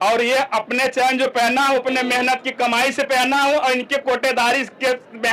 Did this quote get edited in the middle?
no; 0 cuts

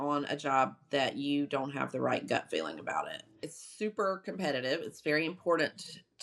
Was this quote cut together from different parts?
yes; 1 cut; at 3.6 s

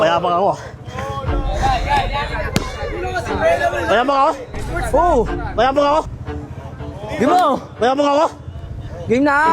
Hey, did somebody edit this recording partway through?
yes; 1 cut; at 6.1 s

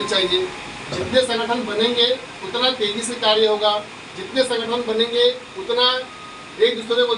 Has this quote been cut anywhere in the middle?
no; 0 cuts

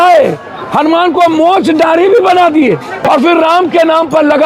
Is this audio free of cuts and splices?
no; 1 cut; at 3.0 s

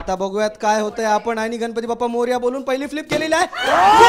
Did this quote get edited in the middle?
no; 0 cuts

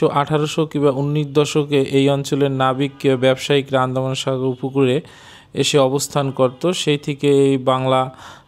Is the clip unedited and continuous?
yes; 0 cuts

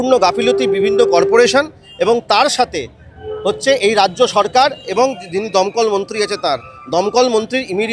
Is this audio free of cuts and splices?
yes; 0 cuts

